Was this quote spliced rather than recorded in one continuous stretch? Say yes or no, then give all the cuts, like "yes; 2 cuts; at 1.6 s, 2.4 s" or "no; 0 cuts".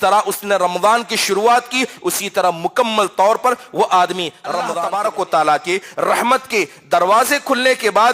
yes; 1 cut; at 4.7 s